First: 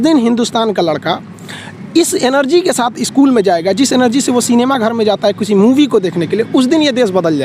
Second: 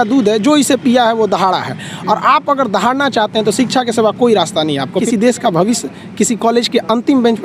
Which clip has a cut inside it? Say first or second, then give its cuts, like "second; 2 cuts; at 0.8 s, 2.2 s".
second; 1 cut; at 5.0 s